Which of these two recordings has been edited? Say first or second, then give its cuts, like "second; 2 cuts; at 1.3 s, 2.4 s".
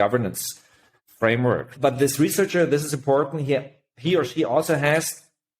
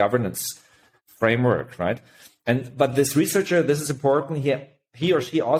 first; 1 cut; at 1.7 s